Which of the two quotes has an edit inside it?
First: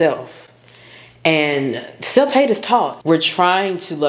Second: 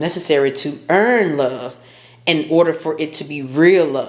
first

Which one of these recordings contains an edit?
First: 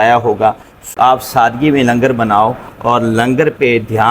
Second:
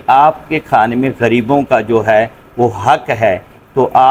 first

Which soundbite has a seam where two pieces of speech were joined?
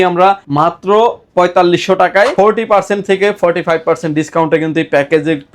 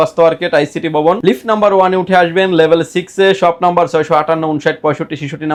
first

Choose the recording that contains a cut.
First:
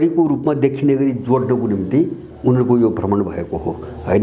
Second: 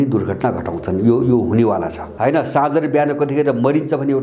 second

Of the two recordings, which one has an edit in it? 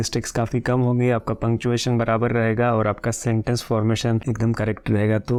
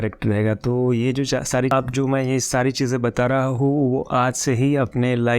second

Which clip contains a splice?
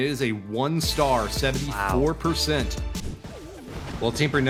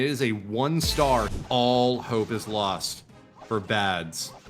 second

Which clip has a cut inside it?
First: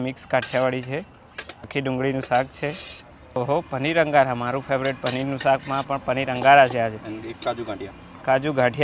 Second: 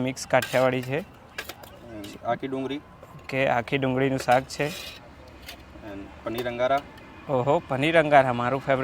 first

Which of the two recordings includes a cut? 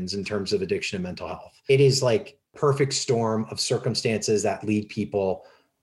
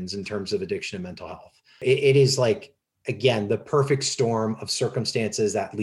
first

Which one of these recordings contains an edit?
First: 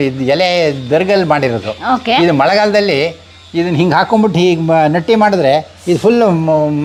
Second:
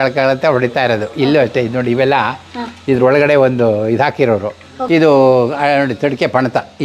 second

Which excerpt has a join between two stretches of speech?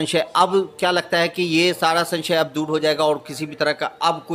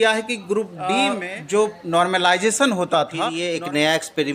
second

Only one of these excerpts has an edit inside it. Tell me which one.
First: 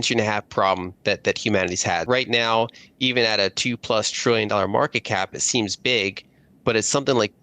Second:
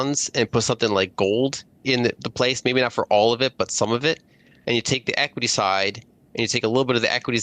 first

